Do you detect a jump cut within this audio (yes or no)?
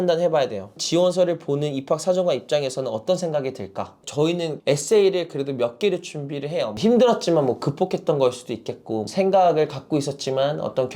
yes